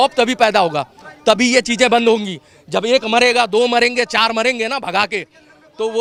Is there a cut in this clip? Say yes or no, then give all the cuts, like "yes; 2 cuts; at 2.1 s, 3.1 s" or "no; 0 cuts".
no; 0 cuts